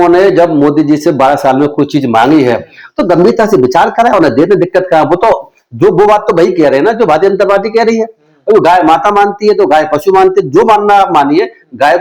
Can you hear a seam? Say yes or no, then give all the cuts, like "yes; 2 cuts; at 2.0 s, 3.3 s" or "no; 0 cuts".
no; 0 cuts